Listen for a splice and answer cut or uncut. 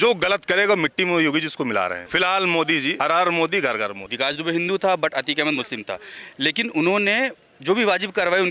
cut